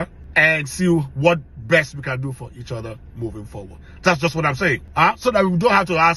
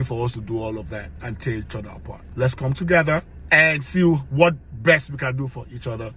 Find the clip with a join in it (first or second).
second